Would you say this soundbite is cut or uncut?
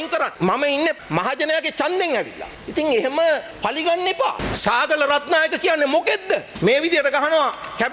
cut